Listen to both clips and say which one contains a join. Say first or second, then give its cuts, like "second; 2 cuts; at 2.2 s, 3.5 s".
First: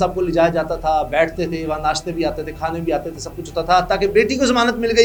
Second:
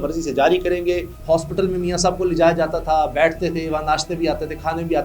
second; 1 cut; at 1.1 s